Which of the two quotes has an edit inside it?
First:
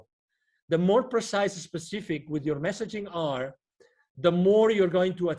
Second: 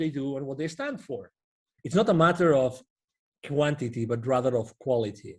second; 1 cut; at 1.7 s

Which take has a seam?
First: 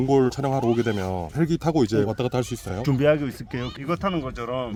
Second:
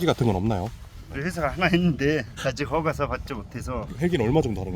second; 2 cuts; at 1.1 s, 3.8 s

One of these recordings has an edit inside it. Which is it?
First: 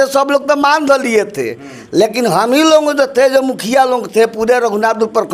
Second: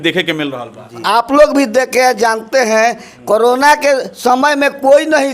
second; 1 cut; at 1.0 s

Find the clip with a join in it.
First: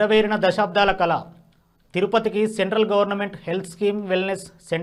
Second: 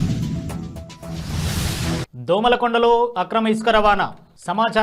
second; 1 cut; at 2.1 s

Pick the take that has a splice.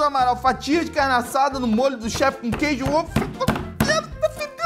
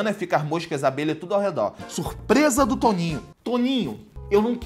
second; 1 cut; at 1.8 s

